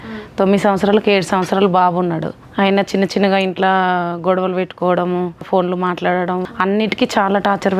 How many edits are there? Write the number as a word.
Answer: three